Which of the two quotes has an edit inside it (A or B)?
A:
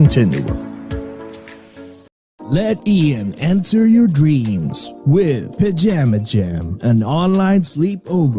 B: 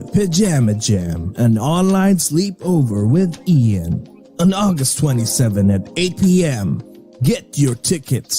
A